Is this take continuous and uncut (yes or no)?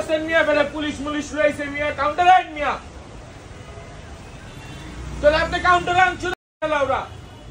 yes